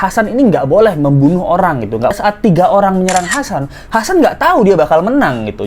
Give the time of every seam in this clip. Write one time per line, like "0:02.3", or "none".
0:02.1